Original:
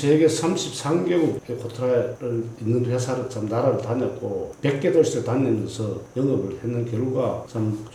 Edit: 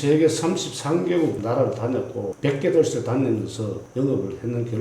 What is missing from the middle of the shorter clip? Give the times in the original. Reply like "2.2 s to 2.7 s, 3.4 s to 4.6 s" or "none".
1.4 s to 3.5 s, 4.4 s to 4.5 s